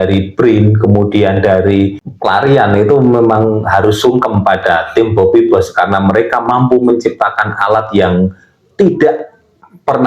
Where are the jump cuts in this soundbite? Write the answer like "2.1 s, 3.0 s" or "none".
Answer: 2.1 s